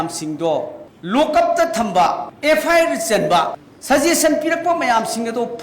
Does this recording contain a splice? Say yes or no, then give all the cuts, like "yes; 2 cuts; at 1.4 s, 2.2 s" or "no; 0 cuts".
yes; 1 cut; at 2.3 s